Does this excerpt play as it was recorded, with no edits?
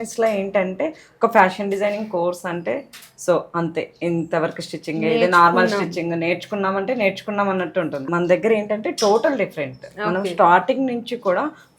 yes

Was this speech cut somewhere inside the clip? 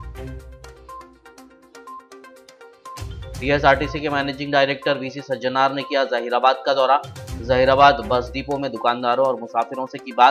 no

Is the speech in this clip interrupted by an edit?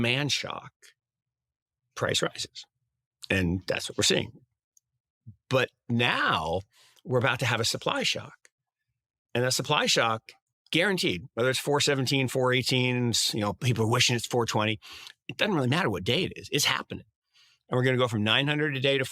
no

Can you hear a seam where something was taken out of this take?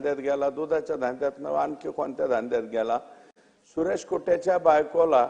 no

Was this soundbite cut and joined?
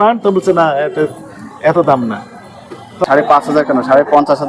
yes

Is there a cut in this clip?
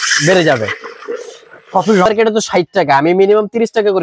yes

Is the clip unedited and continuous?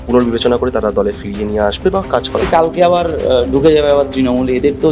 no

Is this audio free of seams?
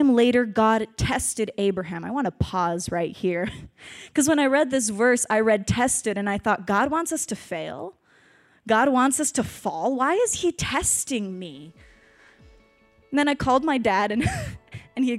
yes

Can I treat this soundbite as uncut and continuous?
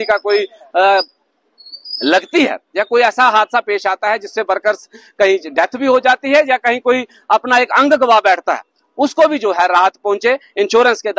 yes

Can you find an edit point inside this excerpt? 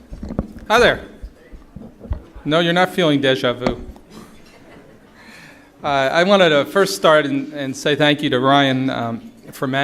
yes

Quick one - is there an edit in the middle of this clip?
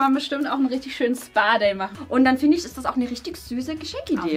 yes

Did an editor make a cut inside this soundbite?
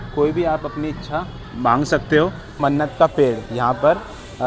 yes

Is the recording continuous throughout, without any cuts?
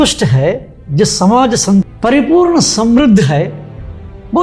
yes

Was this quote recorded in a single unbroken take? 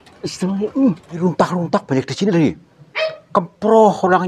no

